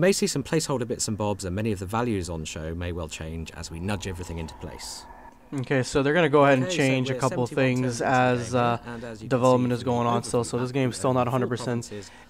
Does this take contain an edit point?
yes; 1 cut; at 3.8 s

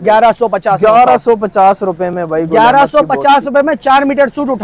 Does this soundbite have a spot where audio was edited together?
no; 0 cuts

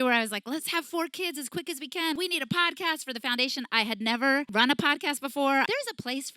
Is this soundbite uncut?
no; 3 cuts; at 2.2 s, 4.5 s, 5.7 s

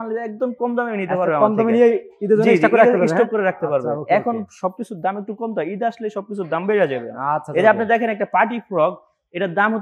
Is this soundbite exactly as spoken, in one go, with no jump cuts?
yes; 0 cuts

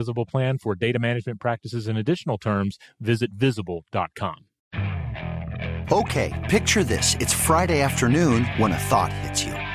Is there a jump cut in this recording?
yes; 1 cut; at 4.5 s

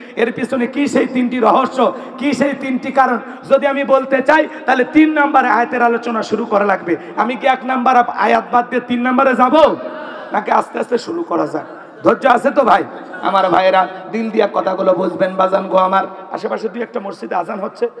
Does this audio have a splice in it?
no; 0 cuts

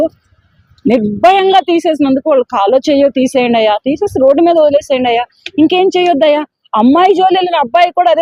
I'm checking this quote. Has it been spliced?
no; 0 cuts

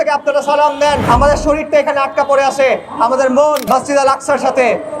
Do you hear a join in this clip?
yes; 2 cuts; at 1.0 s, 3.6 s

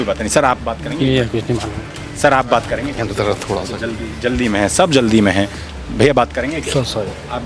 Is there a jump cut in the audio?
no; 0 cuts

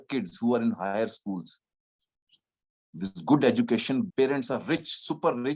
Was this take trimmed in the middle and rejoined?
yes; 1 cut; at 4.1 s

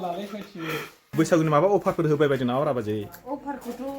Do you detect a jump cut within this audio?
yes; 1 cut; at 1.0 s

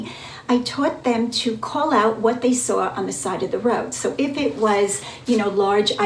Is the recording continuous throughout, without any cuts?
yes; 0 cuts

